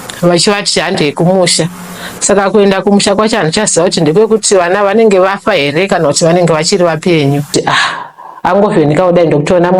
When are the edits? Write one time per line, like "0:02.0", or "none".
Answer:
0:07.5